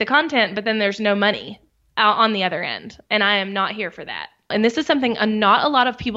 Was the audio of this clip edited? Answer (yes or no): yes